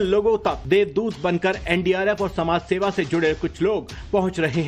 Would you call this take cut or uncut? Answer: cut